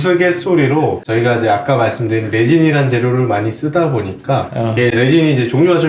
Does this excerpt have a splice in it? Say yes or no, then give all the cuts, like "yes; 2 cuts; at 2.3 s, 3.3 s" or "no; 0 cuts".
no; 0 cuts